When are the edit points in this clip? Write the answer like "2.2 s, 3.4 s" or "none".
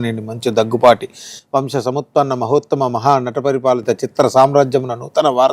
none